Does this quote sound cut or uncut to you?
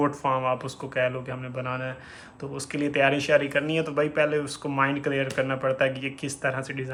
uncut